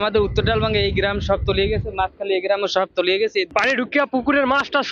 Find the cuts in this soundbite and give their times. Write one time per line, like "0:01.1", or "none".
none